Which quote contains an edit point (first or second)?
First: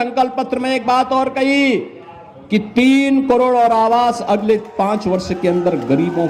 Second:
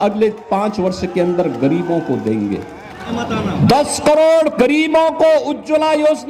second